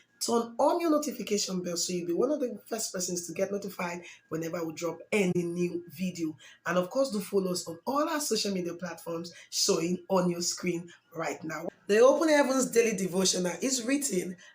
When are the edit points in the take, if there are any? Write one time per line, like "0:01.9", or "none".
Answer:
0:11.7

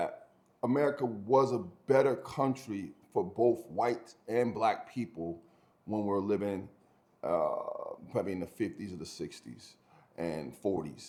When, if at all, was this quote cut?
none

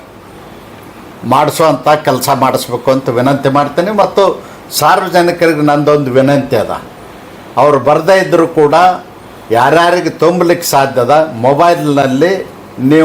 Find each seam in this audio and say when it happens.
none

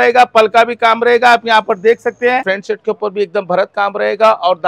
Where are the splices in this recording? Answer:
0:02.5

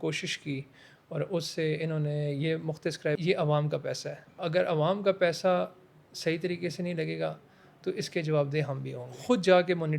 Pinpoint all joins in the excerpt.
0:03.2
0:04.4
0:09.2

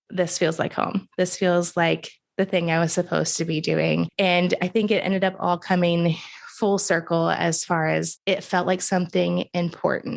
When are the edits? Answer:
0:04.1
0:08.1

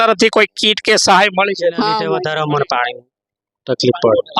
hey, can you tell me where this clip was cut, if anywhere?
0:02.2

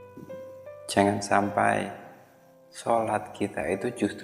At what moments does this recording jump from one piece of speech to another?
0:00.9

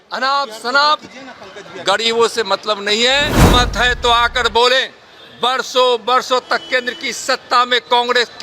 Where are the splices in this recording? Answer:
0:03.4

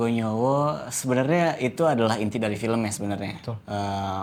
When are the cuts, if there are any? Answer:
none

